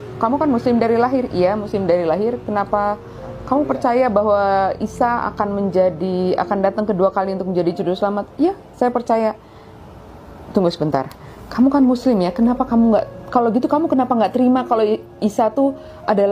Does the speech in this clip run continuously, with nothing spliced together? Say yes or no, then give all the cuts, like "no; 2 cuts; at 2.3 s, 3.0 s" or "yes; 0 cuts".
yes; 0 cuts